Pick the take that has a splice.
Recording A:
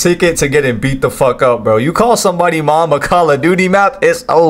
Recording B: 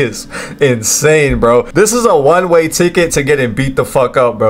B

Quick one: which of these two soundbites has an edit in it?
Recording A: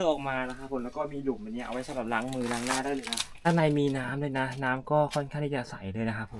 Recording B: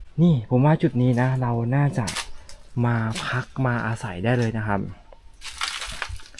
A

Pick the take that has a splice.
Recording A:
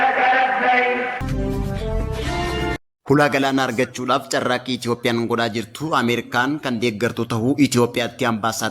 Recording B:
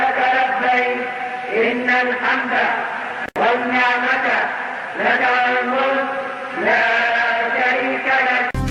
A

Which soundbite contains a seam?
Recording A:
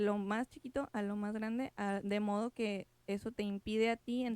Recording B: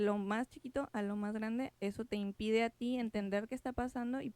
B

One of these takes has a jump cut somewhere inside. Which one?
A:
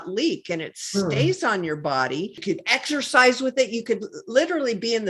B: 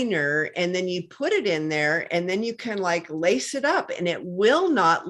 A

